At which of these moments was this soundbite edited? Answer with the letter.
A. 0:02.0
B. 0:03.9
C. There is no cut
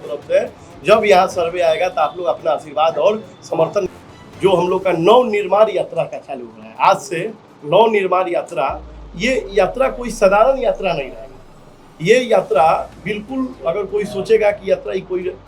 B